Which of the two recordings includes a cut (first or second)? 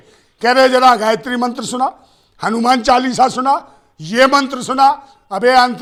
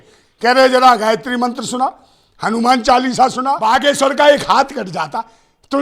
second